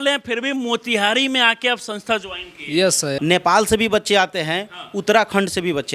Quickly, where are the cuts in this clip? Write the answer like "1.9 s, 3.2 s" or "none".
3.2 s